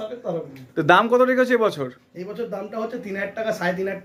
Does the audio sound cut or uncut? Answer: uncut